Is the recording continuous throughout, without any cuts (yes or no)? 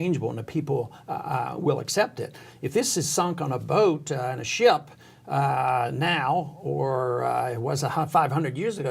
yes